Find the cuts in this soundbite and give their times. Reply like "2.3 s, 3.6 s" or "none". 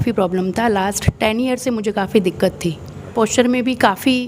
3.1 s